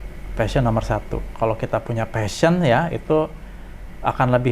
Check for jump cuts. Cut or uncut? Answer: cut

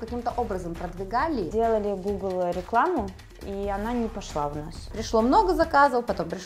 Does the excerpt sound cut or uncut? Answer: cut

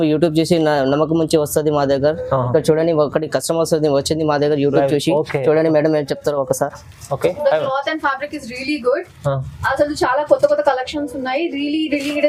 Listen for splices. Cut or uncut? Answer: uncut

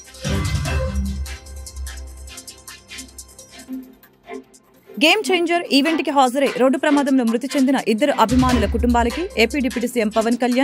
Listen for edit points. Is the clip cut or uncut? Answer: cut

